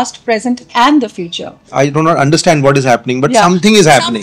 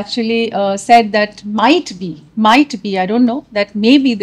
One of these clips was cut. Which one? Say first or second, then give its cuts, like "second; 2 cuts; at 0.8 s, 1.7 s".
first; 1 cut; at 1.7 s